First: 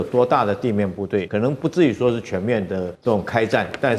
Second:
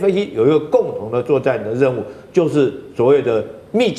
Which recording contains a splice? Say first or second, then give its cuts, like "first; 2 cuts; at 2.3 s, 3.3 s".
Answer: first; 2 cuts; at 1.3 s, 2.9 s